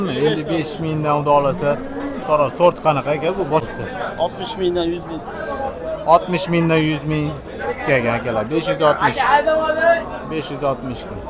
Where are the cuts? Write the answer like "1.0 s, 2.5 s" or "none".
3.6 s